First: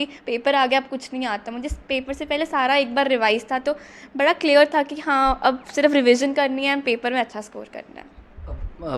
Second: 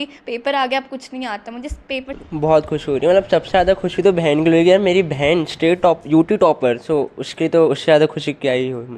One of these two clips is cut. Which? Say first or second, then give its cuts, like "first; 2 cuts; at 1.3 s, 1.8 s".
second; 1 cut; at 2.2 s